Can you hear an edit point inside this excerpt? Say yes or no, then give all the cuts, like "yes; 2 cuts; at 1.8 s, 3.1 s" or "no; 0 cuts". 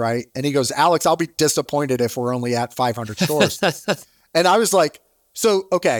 no; 0 cuts